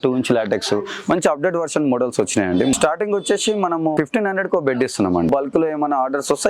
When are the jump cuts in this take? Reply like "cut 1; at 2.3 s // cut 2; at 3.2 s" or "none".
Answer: cut 1; at 2.7 s // cut 2; at 3.9 s // cut 3; at 5.3 s